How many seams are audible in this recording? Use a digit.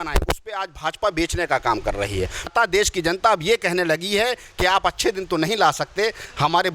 1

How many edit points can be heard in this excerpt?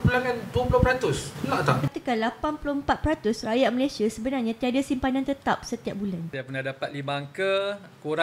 2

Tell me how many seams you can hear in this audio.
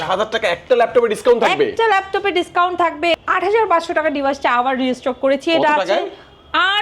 1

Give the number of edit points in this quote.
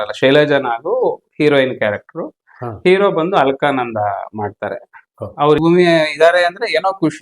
1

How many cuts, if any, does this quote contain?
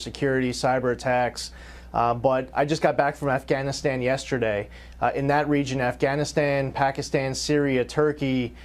1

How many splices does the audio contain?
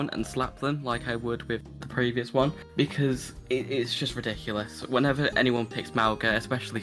0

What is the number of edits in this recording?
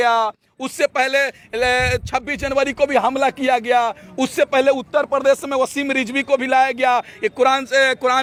0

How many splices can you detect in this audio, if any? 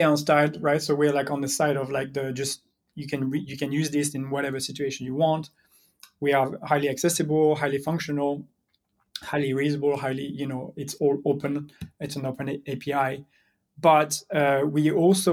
0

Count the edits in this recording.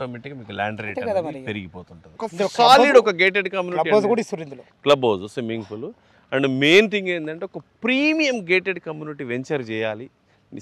1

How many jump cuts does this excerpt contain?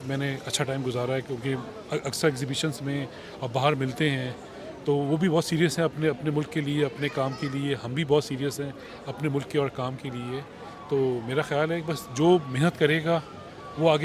0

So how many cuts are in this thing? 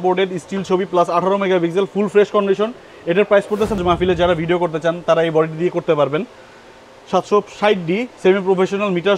1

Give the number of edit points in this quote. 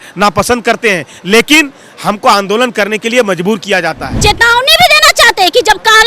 1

